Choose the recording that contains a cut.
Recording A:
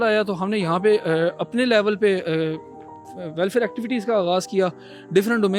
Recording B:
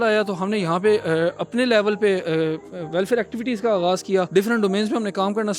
B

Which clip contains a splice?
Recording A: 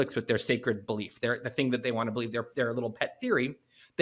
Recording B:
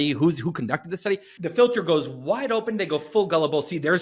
B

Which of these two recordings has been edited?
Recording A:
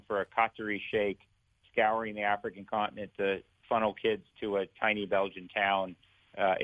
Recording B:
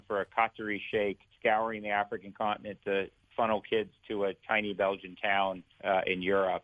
B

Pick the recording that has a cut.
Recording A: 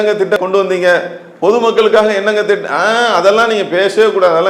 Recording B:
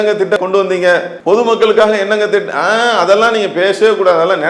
B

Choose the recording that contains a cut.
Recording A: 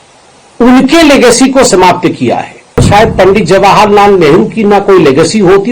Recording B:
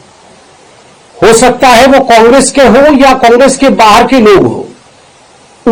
A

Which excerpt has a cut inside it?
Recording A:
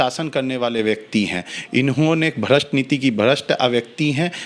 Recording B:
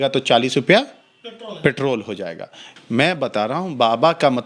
B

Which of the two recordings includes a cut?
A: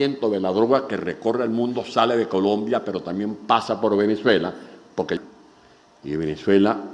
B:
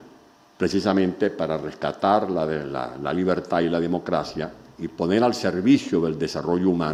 A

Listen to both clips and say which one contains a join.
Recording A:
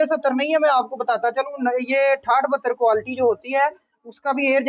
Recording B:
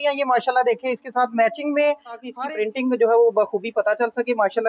B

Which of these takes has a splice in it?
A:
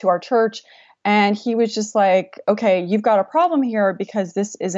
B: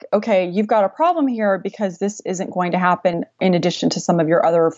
B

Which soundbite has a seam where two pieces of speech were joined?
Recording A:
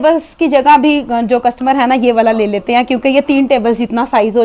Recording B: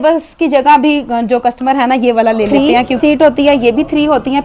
B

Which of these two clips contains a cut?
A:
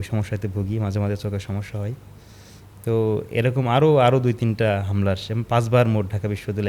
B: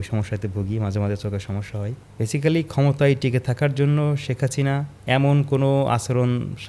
B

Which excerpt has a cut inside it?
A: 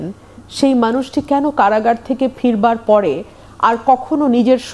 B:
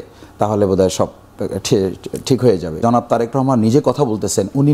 B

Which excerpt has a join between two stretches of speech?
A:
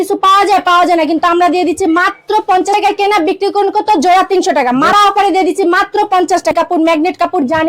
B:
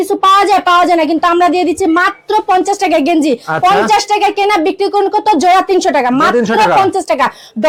A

